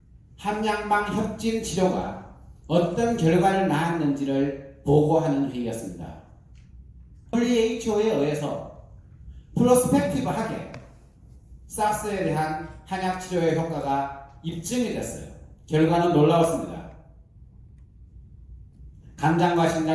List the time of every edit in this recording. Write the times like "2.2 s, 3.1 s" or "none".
7.3 s